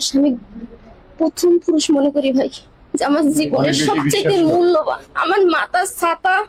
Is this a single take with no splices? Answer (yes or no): yes